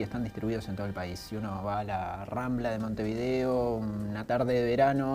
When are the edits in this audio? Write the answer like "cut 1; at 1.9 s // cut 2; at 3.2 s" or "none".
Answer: none